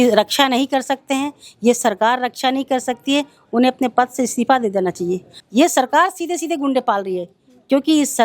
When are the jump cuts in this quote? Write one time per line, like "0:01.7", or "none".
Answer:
0:05.3